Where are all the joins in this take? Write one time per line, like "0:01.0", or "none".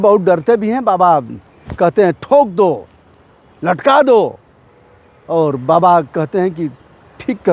none